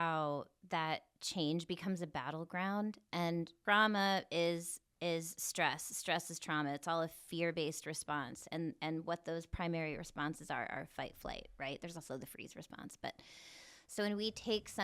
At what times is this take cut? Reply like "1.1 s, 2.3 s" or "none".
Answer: 3.5 s, 4.8 s